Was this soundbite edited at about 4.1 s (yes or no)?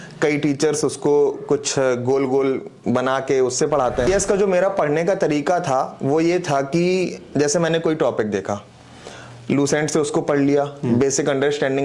yes